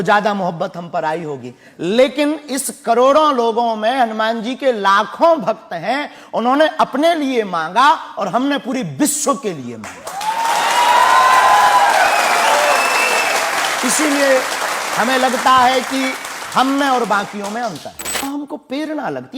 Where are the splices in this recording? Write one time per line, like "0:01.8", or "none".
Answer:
0:18.1